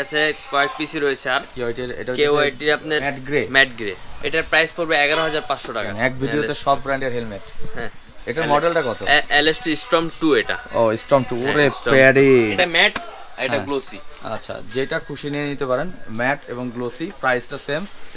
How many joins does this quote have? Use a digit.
5